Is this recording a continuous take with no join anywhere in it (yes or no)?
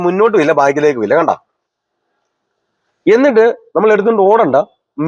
yes